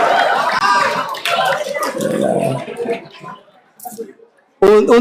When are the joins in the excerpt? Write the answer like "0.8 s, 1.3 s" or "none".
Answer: none